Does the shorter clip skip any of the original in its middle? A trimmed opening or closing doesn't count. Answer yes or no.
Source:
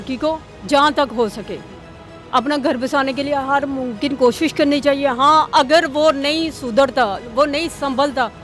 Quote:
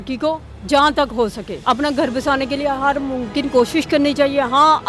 yes